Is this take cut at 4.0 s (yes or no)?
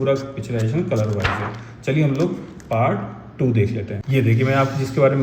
yes